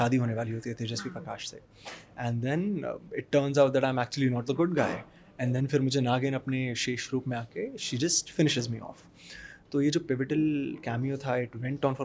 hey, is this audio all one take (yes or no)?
yes